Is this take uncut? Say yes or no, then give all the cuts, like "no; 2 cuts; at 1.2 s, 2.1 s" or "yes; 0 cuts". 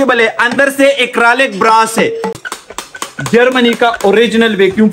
no; 1 cut; at 2.5 s